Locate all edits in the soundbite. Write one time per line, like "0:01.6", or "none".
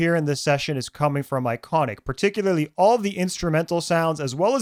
none